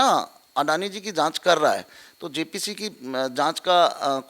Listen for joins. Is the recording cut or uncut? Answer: uncut